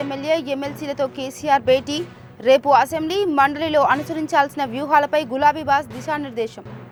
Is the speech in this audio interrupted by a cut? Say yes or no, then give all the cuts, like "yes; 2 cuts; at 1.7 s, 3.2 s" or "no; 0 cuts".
no; 0 cuts